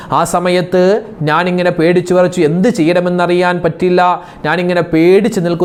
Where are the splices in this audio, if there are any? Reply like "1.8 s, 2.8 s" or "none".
none